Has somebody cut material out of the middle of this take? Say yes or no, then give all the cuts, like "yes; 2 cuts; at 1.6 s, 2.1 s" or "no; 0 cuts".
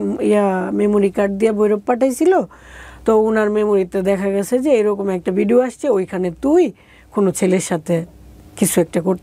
no; 0 cuts